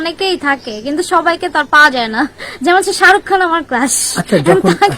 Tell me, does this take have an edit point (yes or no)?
no